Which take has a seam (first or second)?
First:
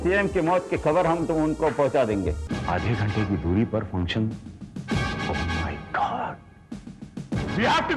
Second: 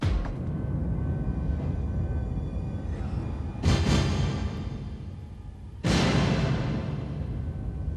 first